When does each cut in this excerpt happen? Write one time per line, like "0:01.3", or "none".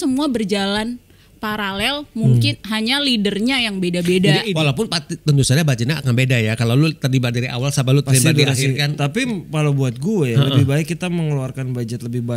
0:04.5